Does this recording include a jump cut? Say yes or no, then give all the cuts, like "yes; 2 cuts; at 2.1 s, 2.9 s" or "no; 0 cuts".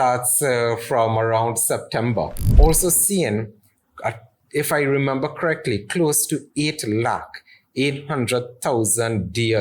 yes; 1 cut; at 2.4 s